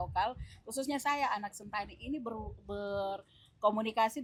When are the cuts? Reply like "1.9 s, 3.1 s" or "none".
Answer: none